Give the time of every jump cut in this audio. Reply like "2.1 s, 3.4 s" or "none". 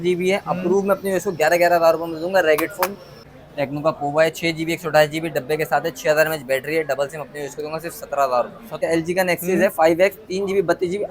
3.1 s, 8.7 s